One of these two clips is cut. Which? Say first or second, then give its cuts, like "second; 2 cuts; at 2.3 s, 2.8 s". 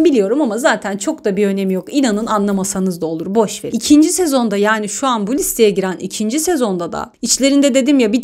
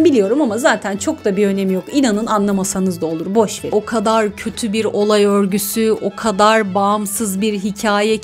second; 1 cut; at 3.7 s